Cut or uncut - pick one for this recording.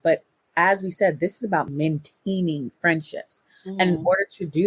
cut